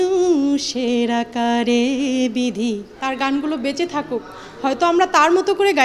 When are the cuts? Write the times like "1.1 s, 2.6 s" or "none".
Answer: 2.9 s